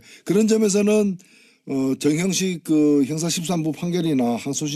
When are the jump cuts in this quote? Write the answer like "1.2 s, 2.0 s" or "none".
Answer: none